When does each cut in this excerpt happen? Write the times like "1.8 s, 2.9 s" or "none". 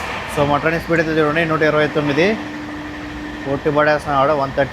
none